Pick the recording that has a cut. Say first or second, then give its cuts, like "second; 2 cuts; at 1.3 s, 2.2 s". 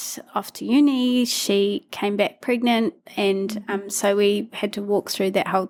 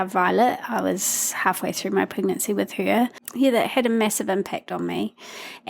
second; 1 cut; at 3.2 s